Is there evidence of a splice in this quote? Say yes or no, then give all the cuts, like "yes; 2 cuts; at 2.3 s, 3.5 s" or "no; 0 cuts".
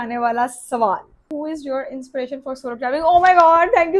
yes; 1 cut; at 1.3 s